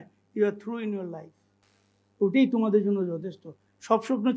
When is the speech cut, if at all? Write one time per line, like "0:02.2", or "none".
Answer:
none